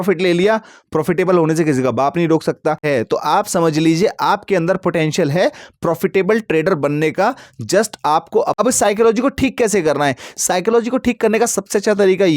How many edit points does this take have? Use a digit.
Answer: 2